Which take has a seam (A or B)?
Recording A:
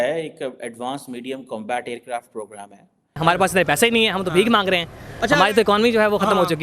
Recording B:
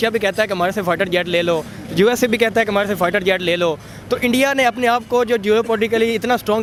A